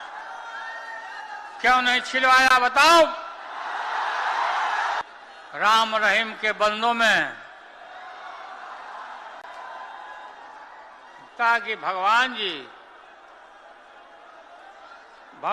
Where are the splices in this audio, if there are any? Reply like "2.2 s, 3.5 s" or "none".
5.0 s